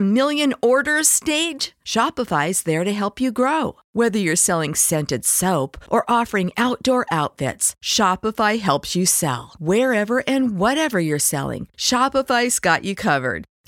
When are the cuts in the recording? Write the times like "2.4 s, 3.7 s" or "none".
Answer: none